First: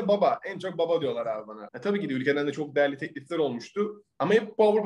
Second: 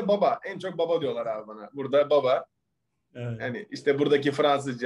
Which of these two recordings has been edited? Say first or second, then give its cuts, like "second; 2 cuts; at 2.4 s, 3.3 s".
first; 1 cut; at 1.6 s